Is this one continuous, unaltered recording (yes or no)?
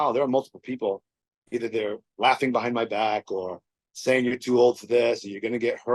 yes